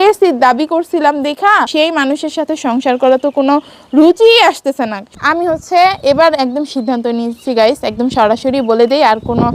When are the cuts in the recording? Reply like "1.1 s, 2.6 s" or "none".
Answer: 1.7 s, 5.1 s